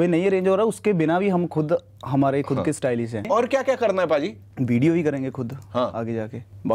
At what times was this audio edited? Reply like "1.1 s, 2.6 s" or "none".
3.3 s